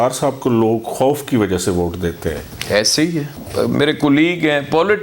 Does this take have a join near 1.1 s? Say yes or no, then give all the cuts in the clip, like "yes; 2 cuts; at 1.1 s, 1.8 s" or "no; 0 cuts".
no; 1 cut; at 3.4 s